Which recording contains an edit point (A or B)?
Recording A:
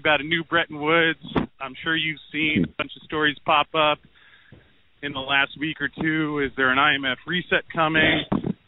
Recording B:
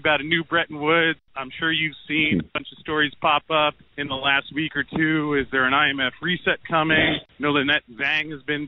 B